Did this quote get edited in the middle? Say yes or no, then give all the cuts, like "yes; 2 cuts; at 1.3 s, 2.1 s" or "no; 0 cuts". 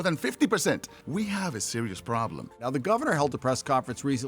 yes; 2 cuts; at 0.9 s, 2.6 s